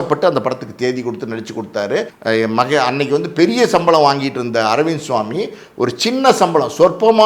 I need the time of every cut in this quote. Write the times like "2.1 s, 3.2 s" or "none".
2.1 s